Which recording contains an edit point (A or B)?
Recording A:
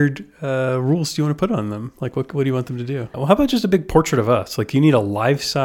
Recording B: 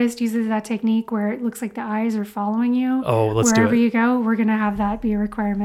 A